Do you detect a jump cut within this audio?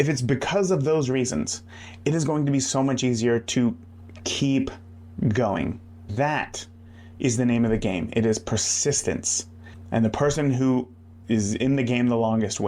yes; 1 cut; at 6.1 s

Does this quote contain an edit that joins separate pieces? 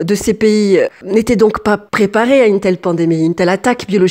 no; 0 cuts

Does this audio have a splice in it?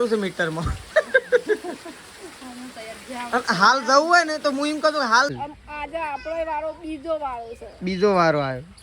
yes; 1 cut; at 5.3 s

